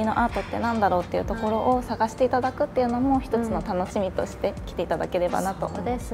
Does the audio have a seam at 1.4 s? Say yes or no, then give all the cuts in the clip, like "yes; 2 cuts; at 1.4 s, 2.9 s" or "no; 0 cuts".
no; 0 cuts